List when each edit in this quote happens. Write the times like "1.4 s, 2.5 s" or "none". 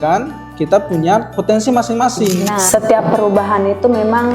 2.6 s